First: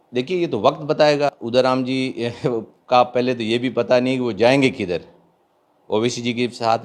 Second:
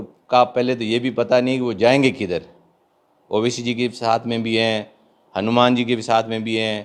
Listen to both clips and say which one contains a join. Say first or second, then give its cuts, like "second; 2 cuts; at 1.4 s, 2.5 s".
first; 1 cut; at 1.4 s